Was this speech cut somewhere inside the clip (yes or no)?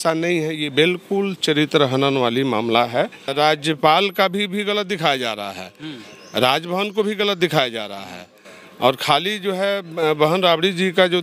yes